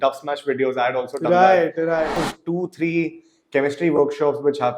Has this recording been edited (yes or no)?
yes